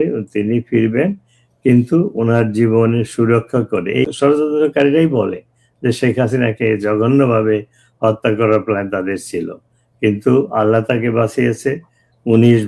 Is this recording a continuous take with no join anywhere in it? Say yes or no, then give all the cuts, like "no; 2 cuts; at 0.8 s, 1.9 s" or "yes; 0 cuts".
no; 1 cut; at 4.1 s